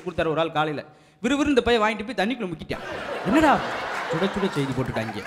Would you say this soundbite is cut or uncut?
uncut